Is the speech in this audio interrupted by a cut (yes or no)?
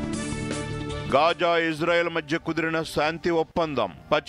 no